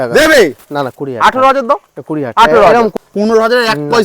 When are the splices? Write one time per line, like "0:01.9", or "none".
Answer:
0:02.9